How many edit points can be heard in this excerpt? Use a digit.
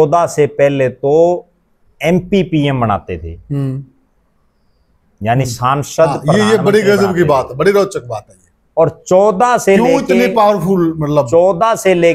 0